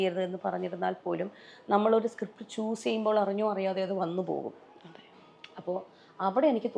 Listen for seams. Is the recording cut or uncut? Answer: uncut